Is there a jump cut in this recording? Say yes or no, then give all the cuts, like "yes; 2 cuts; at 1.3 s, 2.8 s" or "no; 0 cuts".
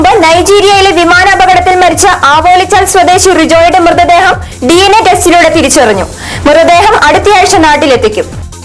no; 0 cuts